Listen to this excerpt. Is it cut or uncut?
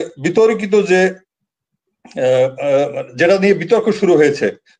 uncut